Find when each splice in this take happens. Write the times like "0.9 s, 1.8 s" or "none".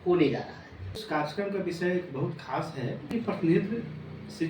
1.0 s, 3.1 s